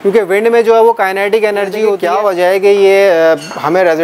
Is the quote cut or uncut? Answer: cut